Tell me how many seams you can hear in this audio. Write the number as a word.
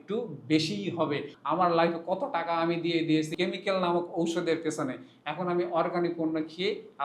two